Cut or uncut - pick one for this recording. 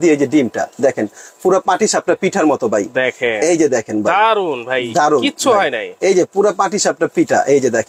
uncut